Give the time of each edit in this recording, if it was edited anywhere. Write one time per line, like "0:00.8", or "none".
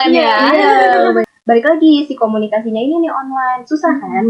0:01.2